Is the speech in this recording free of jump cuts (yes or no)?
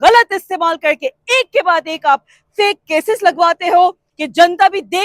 no